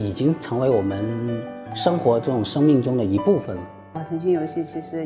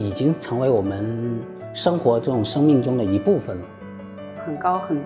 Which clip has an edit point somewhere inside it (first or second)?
second